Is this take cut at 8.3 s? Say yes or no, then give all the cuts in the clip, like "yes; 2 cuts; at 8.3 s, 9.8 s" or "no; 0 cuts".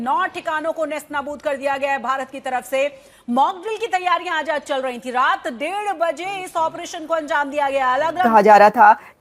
yes; 1 cut; at 8.3 s